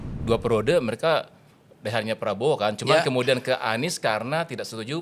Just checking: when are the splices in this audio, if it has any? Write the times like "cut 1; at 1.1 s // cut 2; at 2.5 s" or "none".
none